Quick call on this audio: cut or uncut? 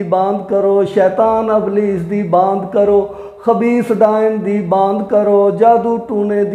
uncut